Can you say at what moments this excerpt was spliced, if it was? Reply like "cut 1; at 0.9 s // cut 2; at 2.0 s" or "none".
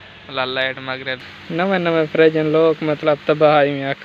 cut 1; at 1.2 s

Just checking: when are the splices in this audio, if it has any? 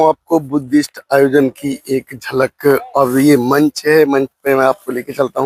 none

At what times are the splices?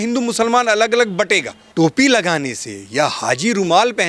cut 1; at 1.7 s

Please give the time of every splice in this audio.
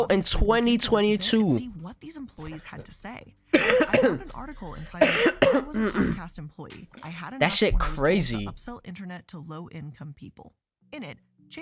none

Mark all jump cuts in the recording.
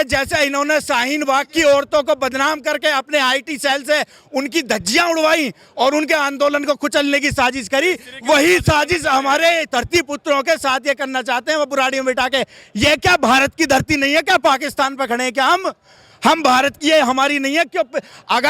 none

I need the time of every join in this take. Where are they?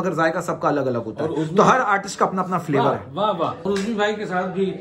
cut 1; at 3.6 s

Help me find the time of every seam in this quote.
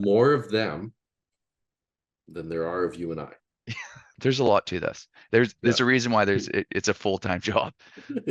cut 1; at 4.2 s

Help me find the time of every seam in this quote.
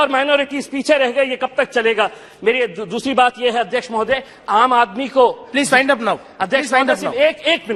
none

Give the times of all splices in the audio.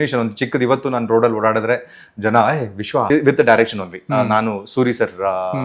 cut 1; at 3.1 s

